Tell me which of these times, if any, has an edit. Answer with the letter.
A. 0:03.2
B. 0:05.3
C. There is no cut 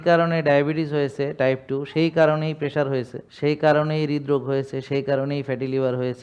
A